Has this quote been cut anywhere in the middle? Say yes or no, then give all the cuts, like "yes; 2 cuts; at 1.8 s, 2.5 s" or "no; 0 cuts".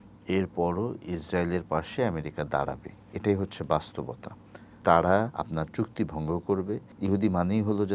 yes; 3 cuts; at 4.8 s, 5.4 s, 6.9 s